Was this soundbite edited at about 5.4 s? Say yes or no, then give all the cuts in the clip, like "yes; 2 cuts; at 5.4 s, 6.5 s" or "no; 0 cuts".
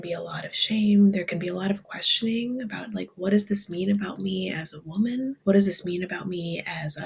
yes; 1 cut; at 5.4 s